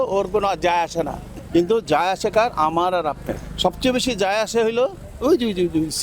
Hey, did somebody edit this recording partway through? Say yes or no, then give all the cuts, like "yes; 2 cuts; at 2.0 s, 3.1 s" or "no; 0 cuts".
no; 0 cuts